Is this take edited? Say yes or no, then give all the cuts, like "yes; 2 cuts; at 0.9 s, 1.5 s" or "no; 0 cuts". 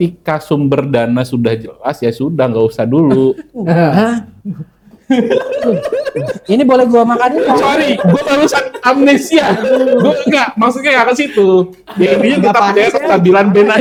no; 0 cuts